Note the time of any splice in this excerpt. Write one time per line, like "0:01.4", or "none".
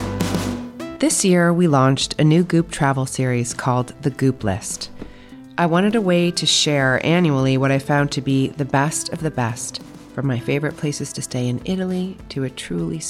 0:00.9

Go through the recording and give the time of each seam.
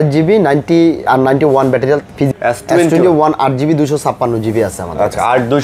0:02.3

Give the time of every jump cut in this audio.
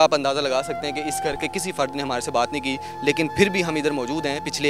none

